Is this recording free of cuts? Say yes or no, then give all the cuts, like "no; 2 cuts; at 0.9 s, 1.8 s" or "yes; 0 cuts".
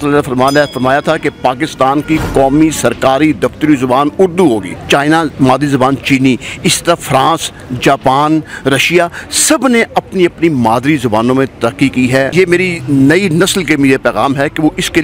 no; 2 cuts; at 4.7 s, 12.3 s